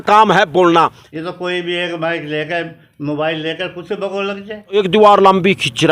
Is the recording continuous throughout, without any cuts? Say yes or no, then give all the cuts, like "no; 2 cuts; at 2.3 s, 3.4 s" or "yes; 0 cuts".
no; 2 cuts; at 1.0 s, 4.8 s